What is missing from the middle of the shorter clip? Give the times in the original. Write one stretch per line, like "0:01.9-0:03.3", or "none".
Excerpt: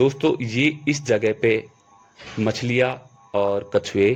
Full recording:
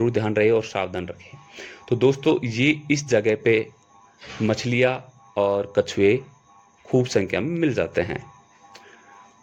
none